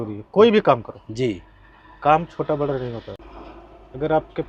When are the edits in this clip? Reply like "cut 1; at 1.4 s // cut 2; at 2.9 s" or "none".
none